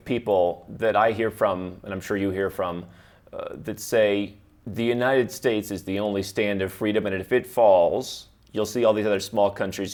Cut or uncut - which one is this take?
uncut